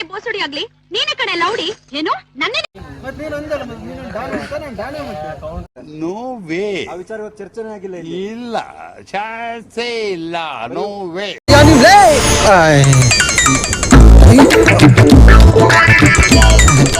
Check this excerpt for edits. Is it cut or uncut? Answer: cut